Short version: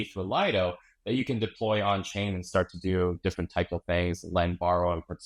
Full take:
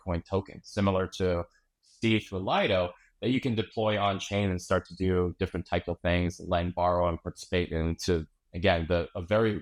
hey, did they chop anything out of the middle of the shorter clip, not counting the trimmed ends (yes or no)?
no